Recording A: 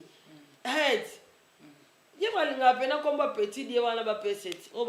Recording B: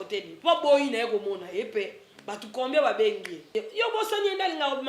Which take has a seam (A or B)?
B